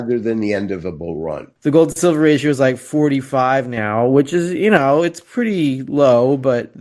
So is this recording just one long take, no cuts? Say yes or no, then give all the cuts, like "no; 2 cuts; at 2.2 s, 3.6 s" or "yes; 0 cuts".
no; 1 cut; at 1.4 s